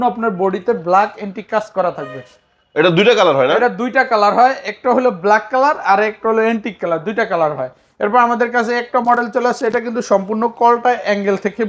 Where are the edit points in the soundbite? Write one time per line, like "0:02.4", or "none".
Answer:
none

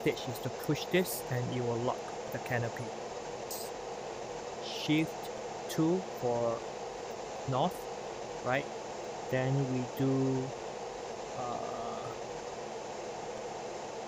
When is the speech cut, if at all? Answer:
0:03.5

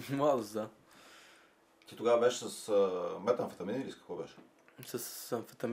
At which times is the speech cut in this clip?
none

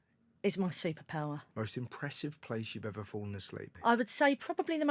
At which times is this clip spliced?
0:01.5
0:03.6

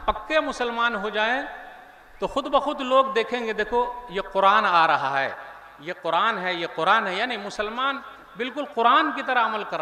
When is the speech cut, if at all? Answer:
none

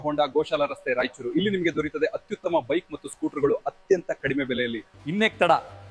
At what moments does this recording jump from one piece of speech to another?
0:04.9

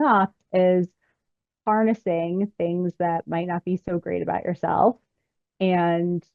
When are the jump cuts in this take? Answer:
none

